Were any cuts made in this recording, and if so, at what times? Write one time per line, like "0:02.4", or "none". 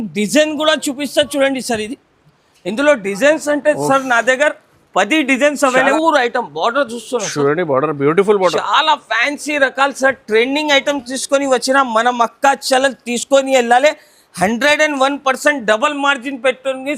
0:05.9